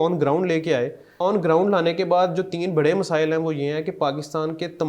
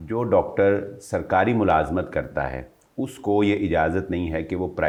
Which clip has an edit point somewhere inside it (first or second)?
first